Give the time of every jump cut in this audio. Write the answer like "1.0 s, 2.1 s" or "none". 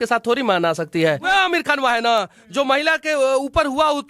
1.3 s